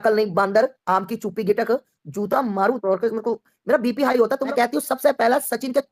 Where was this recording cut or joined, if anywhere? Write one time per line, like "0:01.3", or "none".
0:04.4